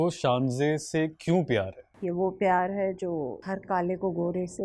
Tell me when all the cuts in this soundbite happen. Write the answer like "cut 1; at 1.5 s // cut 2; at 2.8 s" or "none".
cut 1; at 1.8 s // cut 2; at 3.4 s

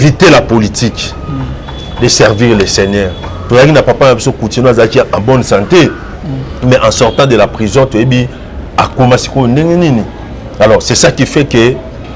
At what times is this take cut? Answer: cut 1; at 3.3 s

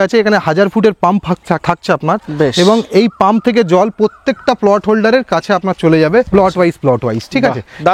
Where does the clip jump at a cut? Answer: none

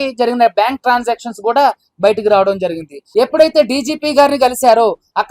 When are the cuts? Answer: cut 1; at 3.0 s

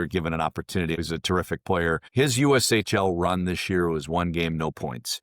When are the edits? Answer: cut 1; at 1.0 s // cut 2; at 2.1 s

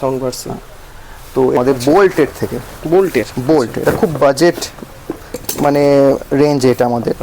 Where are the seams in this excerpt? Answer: cut 1; at 1.6 s

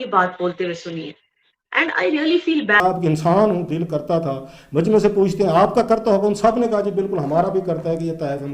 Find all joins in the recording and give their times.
cut 1; at 2.8 s

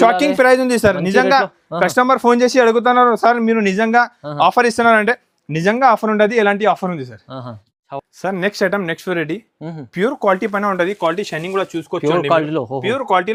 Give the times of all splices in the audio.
none

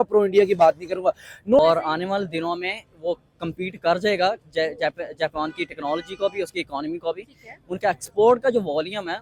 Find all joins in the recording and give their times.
cut 1; at 1.6 s

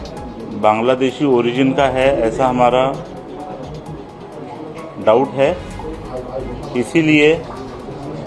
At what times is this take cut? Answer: none

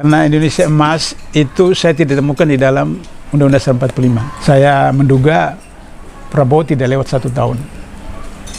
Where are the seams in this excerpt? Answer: cut 1; at 4.3 s

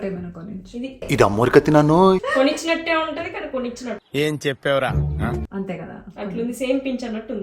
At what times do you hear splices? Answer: cut 1; at 2.3 s // cut 2; at 5.5 s

